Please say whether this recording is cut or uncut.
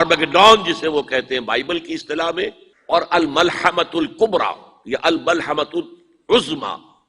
cut